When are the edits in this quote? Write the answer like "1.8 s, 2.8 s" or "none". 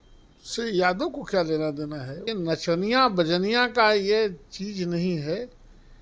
2.2 s